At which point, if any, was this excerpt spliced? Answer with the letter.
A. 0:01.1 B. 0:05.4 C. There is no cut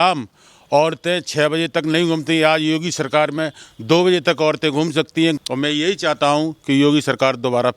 B